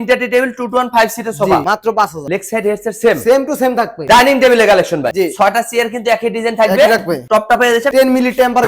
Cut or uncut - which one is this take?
cut